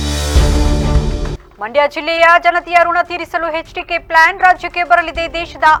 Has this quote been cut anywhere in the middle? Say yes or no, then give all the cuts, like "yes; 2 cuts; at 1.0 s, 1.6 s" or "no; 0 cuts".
no; 0 cuts